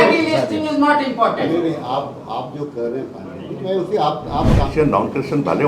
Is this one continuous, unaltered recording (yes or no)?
no